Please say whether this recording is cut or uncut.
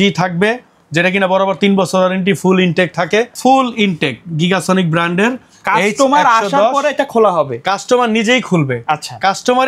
cut